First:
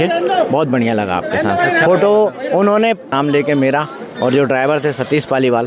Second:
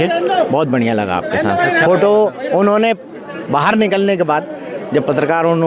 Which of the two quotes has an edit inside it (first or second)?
first